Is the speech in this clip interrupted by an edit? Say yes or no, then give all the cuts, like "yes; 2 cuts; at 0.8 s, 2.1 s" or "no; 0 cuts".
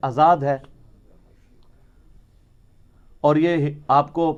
no; 0 cuts